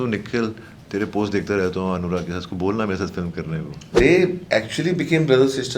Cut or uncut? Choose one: cut